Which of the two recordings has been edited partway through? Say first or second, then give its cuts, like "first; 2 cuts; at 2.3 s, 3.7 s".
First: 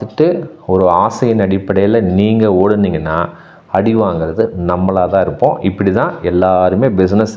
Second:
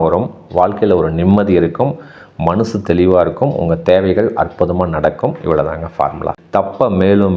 second; 1 cut; at 6.4 s